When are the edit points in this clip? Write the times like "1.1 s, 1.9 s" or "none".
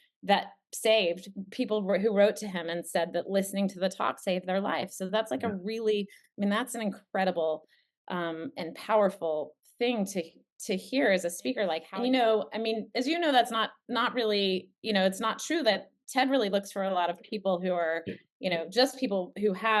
11.9 s